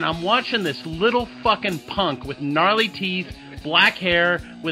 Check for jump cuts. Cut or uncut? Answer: cut